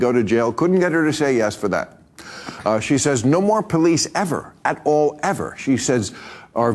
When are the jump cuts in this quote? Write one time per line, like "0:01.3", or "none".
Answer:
none